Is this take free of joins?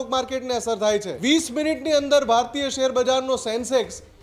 no; 1 cut; at 1.1 s

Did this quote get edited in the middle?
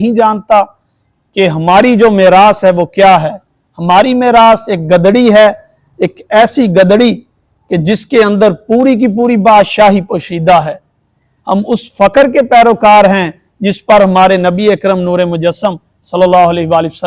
no; 0 cuts

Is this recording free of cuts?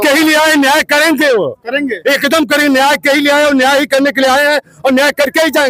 yes; 0 cuts

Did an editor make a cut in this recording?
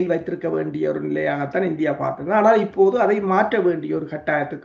no; 0 cuts

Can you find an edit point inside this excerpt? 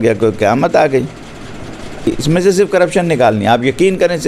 yes; 1 cut; at 2.1 s

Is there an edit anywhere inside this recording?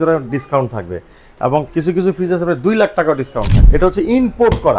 yes; 1 cut; at 3.6 s

